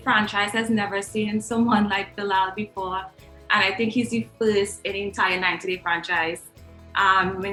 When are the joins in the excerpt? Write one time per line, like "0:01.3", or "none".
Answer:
none